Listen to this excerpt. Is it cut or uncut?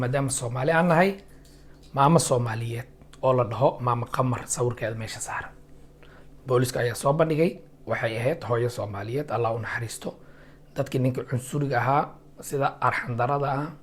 uncut